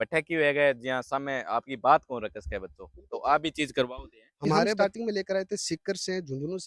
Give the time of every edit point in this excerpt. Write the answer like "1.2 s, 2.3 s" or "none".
4.8 s